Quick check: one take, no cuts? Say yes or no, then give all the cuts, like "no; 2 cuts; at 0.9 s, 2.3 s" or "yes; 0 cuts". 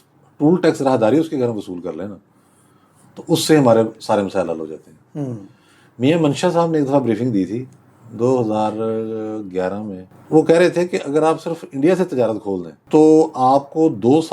yes; 0 cuts